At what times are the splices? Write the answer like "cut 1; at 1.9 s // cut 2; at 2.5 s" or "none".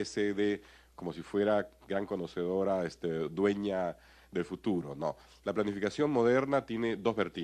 none